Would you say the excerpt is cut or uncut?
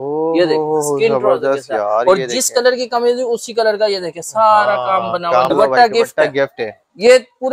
cut